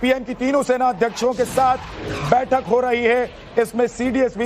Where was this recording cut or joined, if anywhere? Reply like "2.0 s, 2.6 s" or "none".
1.0 s